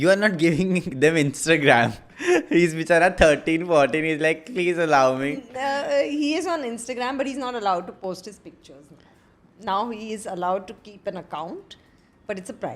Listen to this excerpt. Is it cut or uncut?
uncut